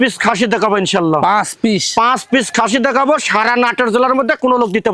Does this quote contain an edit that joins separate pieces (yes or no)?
no